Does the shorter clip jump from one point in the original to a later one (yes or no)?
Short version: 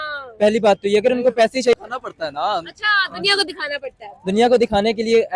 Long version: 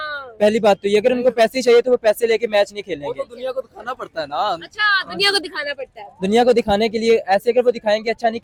yes